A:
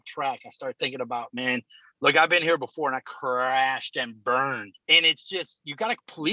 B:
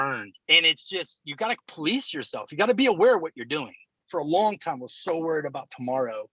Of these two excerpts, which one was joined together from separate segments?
B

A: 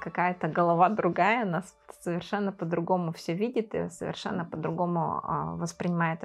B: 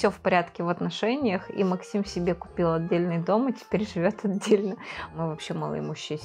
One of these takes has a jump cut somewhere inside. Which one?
B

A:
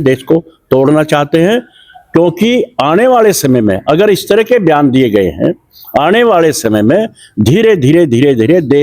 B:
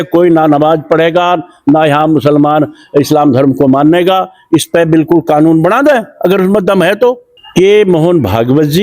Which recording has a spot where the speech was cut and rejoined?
B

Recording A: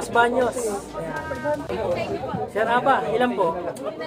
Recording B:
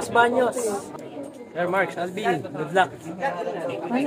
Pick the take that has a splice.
B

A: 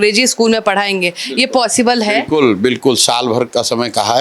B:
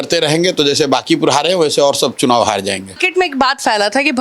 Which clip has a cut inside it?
B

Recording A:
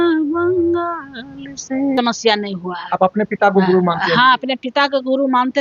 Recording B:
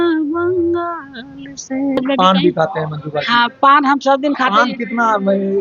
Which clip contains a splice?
B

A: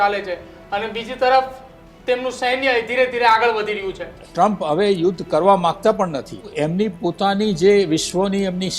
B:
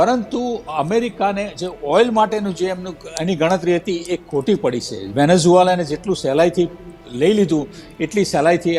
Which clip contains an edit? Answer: A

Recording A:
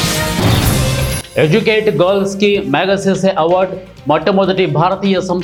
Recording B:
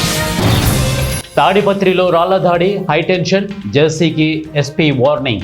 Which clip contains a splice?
B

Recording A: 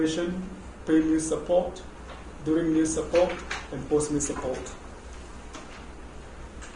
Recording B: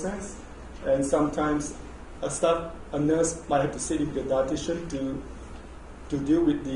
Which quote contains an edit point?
B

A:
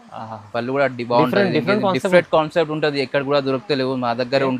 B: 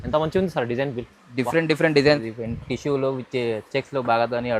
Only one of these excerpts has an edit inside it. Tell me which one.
B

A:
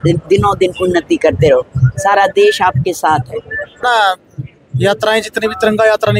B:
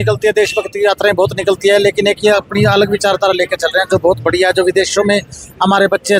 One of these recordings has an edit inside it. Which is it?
A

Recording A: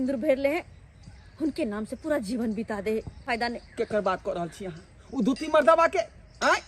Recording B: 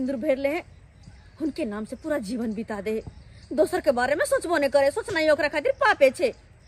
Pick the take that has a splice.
A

